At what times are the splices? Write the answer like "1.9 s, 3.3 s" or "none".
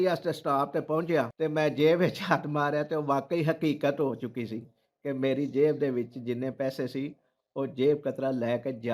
1.3 s